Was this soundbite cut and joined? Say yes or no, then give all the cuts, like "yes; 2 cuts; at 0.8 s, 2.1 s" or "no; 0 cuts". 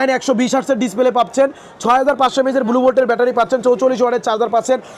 no; 0 cuts